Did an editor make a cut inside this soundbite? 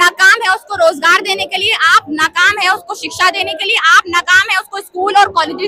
no; 0 cuts

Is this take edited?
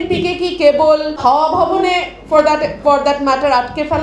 yes; 1 cut; at 1.2 s

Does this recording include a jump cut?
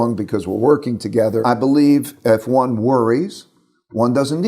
yes; 1 cut; at 1.4 s

